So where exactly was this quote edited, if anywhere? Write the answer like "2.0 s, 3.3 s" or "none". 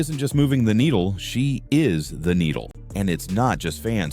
2.7 s